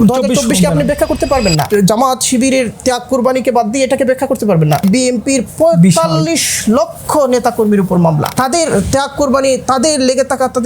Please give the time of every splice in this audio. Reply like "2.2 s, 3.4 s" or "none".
1.7 s, 4.8 s, 8.3 s